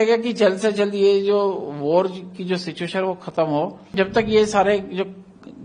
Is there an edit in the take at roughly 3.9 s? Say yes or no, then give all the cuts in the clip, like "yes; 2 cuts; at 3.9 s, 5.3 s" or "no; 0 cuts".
yes; 1 cut; at 3.9 s